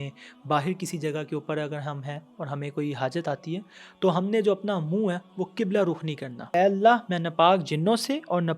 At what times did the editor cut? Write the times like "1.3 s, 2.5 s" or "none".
6.5 s